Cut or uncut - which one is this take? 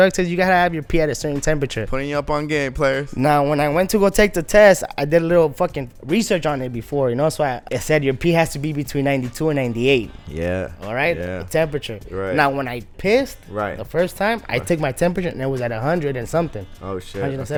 uncut